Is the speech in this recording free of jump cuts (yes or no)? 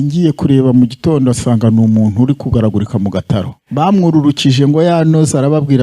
no